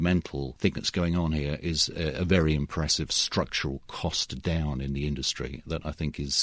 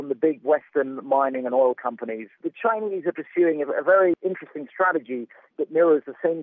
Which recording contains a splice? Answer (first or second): second